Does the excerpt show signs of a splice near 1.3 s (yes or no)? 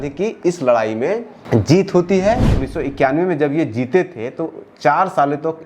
yes